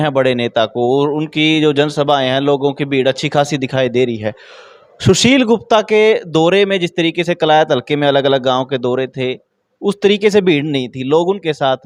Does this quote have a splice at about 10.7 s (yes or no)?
no